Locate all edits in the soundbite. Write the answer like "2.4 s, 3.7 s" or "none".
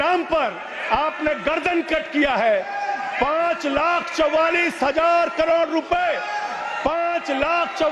none